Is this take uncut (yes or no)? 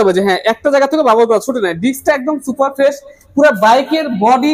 yes